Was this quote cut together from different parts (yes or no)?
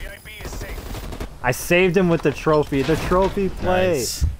yes